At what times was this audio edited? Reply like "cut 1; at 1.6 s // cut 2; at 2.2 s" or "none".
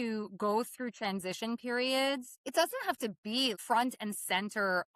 cut 1; at 2.3 s // cut 2; at 3.6 s